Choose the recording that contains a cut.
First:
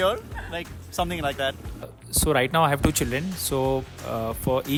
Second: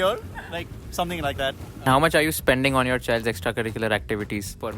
second; 1 cut; at 1.9 s

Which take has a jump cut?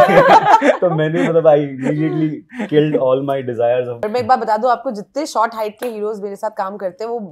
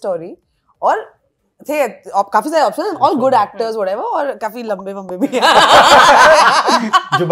first; 1 cut; at 4.0 s

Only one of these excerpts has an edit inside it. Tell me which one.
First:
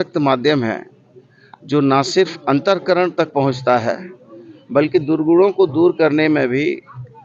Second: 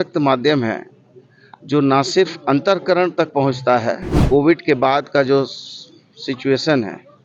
second; 1 cut; at 4.1 s

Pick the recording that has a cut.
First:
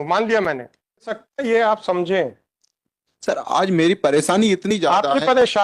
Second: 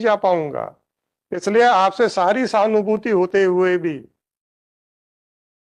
first; 1 cut; at 1.3 s

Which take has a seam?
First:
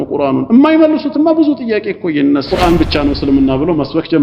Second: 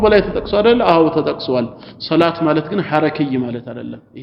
first; 1 cut; at 2.5 s

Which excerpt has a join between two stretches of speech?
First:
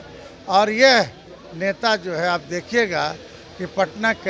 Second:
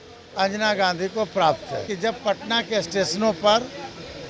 second; 1 cut; at 1.9 s

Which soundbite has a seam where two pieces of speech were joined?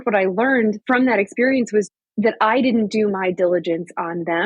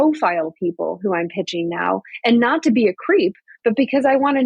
first; 2 cuts; at 0.8 s, 1.9 s

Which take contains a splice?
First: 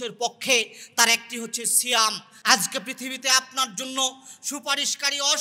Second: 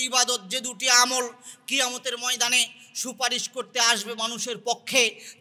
first; 1 cut; at 2.3 s

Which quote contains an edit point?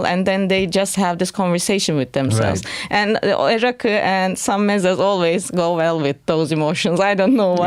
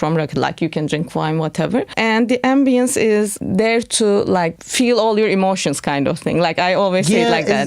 second; 3 cuts; at 1.9 s, 3.4 s, 4.6 s

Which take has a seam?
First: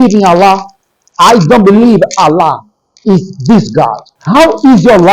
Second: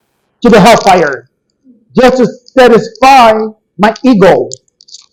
first; 1 cut; at 4.1 s

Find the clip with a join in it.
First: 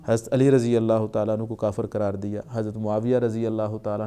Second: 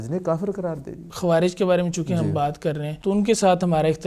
second; 2 cuts; at 1.0 s, 2.9 s

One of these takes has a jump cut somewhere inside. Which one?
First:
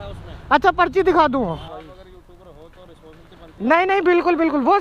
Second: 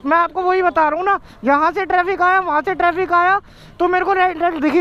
first; 1 cut; at 1.7 s

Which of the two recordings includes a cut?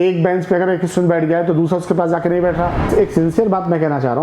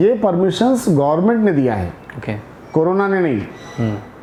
first; 1 cut; at 2.8 s

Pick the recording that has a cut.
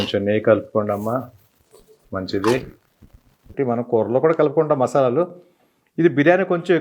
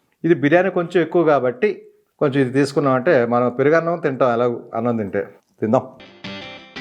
first; 1 cut; at 3.5 s

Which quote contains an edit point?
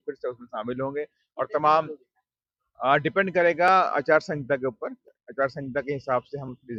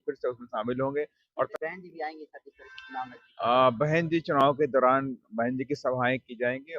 second; 1 cut; at 1.5 s

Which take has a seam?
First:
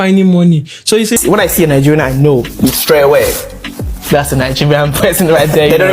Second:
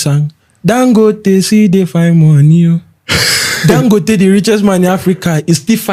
first; 1 cut; at 1.2 s

